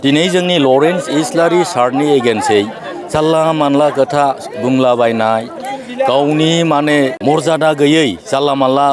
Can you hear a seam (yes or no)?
yes